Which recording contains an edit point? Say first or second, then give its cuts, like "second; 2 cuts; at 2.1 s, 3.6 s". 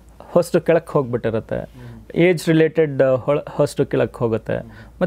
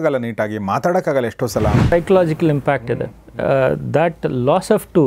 second; 1 cut; at 1.9 s